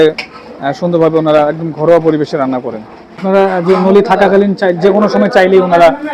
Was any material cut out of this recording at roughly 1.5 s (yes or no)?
no